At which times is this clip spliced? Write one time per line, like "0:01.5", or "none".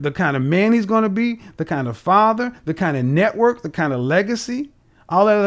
none